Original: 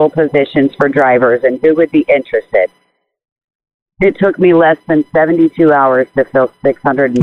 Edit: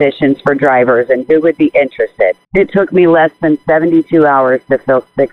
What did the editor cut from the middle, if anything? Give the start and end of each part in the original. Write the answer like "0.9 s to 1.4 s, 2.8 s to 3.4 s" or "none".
2.8 s to 3.9 s